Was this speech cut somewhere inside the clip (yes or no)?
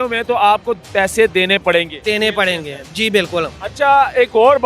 no